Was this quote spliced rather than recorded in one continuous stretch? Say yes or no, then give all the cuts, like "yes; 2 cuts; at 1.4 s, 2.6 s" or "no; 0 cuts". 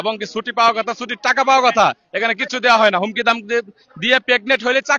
no; 0 cuts